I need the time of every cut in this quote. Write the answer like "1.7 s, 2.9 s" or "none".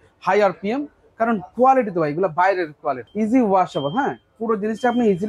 3.1 s